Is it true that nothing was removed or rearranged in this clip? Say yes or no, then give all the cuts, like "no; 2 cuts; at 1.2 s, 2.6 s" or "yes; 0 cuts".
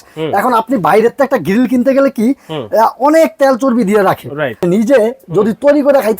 no; 1 cut; at 4.6 s